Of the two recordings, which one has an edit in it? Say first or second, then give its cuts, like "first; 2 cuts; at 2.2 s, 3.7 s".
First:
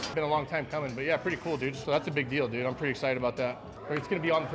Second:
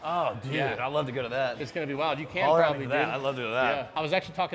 first; 1 cut; at 1.8 s